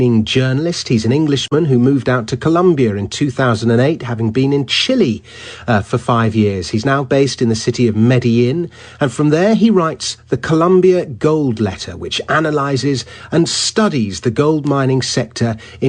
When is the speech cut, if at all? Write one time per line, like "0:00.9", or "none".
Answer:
0:03.3